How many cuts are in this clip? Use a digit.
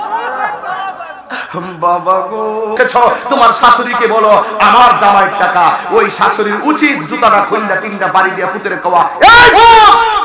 1